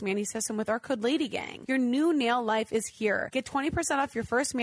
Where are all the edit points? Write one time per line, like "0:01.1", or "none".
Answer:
0:01.5
0:03.3